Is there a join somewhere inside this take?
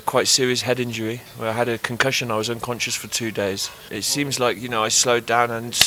yes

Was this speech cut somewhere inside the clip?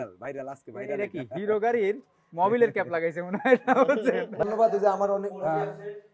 yes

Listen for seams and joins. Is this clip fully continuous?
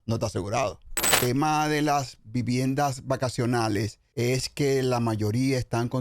no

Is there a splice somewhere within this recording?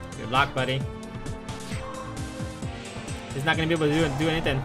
no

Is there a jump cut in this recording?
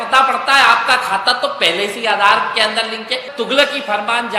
yes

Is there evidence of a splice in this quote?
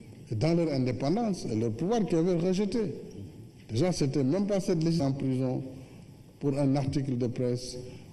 no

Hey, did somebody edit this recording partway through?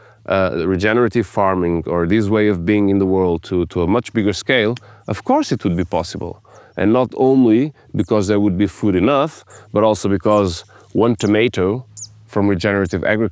no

